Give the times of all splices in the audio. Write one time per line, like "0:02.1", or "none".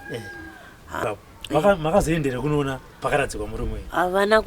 0:01.0